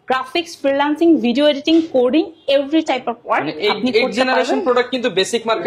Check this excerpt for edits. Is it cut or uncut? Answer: uncut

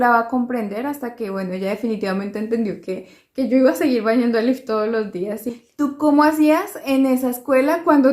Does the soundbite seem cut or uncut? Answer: cut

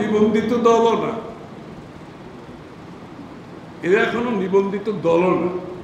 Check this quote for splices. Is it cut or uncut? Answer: uncut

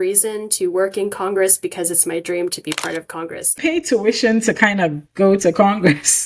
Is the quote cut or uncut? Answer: cut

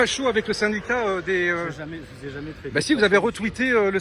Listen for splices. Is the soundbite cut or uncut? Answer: uncut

